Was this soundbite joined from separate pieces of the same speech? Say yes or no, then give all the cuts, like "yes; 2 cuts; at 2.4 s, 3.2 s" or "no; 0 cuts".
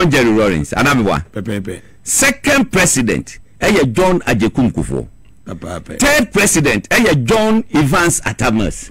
no; 0 cuts